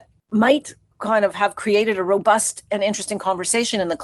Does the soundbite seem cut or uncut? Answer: uncut